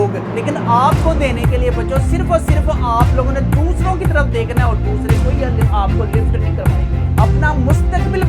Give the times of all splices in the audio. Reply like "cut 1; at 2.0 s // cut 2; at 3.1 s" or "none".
none

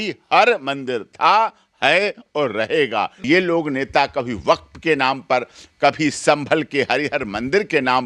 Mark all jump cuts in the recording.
cut 1; at 3.2 s

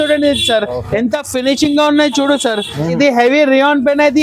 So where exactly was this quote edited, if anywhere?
cut 1; at 3.0 s

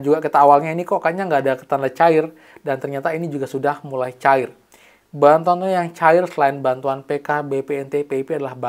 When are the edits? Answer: none

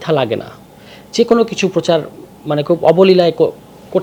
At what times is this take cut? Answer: none

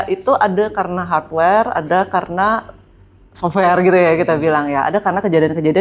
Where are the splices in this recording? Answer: none

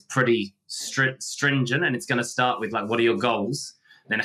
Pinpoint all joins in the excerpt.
none

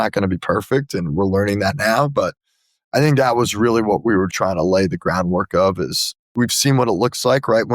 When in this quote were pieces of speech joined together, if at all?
cut 1; at 4.3 s // cut 2; at 6.3 s

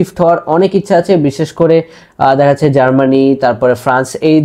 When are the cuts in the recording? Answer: none

